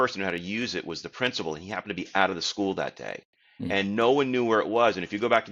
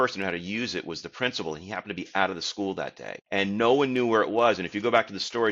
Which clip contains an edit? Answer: second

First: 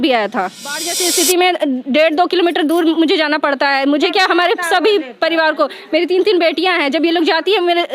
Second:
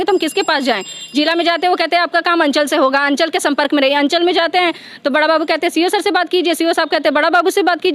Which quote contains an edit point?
first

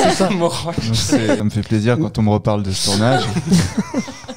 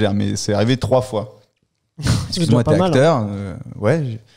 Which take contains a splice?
first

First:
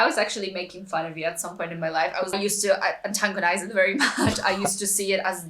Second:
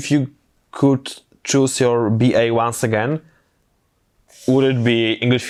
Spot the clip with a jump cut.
first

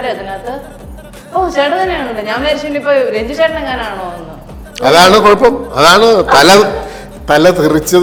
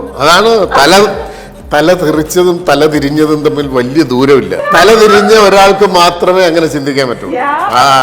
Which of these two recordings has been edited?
second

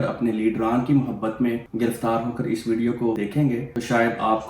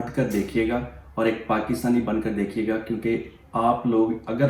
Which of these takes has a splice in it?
first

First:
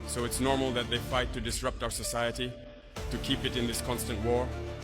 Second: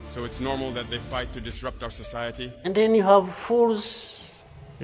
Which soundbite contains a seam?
second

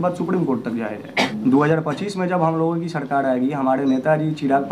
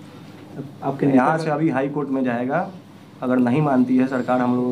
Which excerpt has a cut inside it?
first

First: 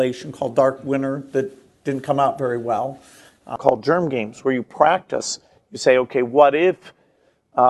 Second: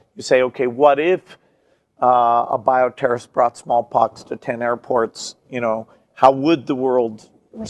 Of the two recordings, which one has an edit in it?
first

